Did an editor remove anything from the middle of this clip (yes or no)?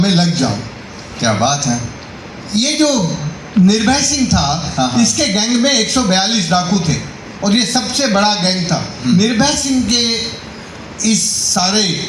yes